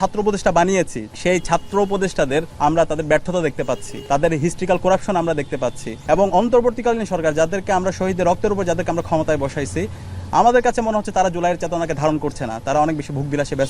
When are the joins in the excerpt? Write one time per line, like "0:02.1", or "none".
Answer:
0:01.0
0:02.5
0:03.9
0:05.9